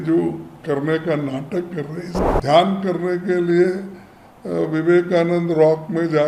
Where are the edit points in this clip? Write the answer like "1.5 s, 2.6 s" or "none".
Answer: 2.1 s